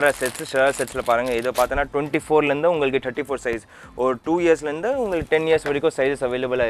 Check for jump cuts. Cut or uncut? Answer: uncut